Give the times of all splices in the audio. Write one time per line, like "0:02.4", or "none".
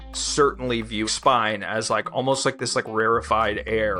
0:01.1

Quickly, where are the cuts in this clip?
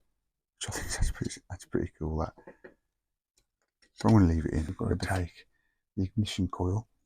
0:05.0

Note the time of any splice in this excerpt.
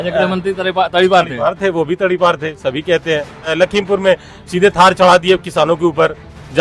0:03.5

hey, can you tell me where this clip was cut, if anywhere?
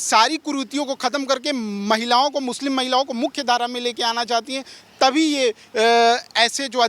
none

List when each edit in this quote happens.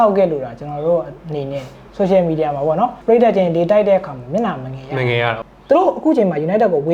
0:01.8
0:03.0
0:05.4

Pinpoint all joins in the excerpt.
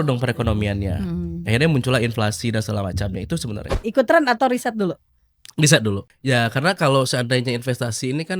0:03.8
0:06.1

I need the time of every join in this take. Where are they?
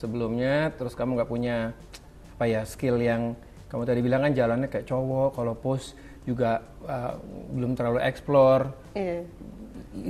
none

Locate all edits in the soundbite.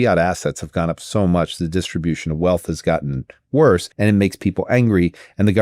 0:03.9

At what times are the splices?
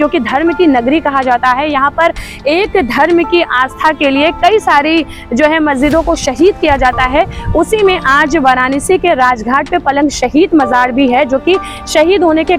none

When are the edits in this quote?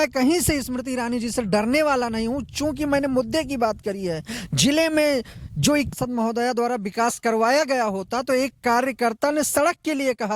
0:05.9

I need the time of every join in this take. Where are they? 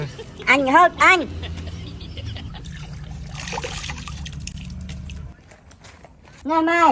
none

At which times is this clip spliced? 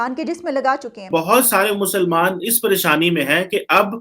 0:01.1

